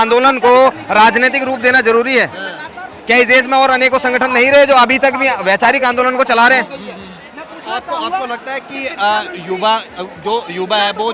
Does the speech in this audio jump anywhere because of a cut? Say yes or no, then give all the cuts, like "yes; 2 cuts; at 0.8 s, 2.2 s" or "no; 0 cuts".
no; 0 cuts